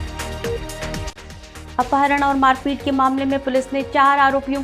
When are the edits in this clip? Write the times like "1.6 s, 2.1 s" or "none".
1.0 s